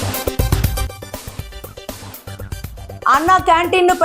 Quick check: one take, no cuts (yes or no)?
no